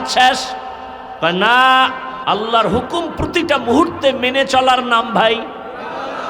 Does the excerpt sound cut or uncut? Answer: cut